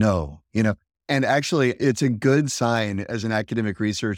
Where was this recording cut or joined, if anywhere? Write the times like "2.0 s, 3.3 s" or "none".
1.8 s